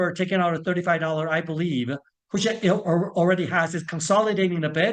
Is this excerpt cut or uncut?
uncut